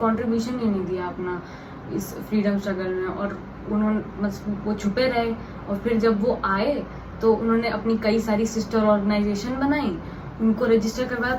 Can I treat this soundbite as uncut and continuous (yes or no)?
yes